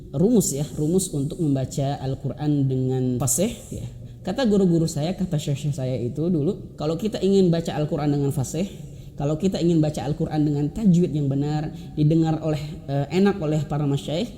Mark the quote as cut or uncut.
cut